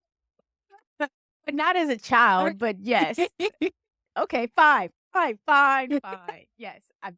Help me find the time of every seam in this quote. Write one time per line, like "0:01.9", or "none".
0:04.0